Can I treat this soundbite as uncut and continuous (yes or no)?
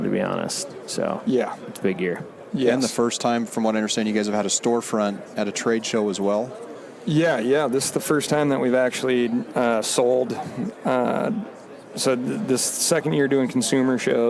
yes